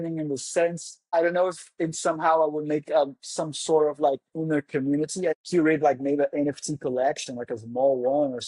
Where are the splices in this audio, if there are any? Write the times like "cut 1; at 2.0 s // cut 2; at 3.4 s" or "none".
cut 1; at 0.9 s // cut 2; at 5.4 s